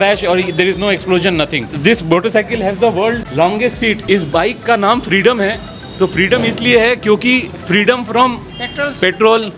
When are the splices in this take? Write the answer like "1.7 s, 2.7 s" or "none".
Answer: 1.7 s, 4.0 s